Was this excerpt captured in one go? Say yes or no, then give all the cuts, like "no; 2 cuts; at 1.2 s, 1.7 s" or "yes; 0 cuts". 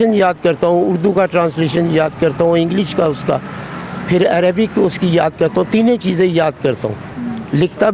yes; 0 cuts